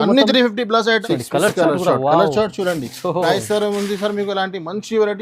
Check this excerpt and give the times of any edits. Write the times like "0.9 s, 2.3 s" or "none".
1.0 s